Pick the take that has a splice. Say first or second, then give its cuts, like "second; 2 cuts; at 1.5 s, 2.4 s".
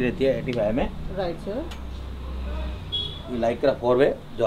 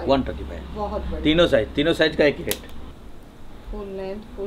second; 1 cut; at 2.8 s